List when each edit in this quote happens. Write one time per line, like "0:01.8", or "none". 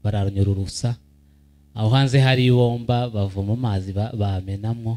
none